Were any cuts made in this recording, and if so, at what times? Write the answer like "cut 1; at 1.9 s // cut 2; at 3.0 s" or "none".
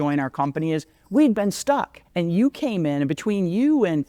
cut 1; at 2.0 s